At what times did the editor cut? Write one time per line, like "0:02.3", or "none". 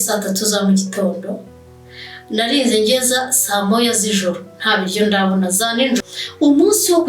0:06.0